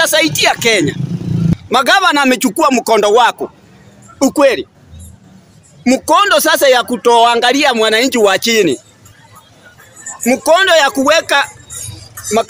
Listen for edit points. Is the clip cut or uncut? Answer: cut